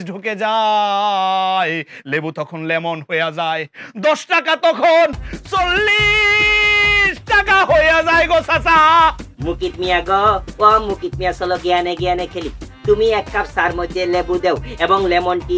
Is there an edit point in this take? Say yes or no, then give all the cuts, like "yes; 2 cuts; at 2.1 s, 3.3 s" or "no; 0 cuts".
no; 0 cuts